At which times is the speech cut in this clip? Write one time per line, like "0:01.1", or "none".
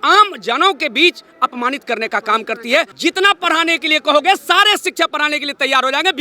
0:02.9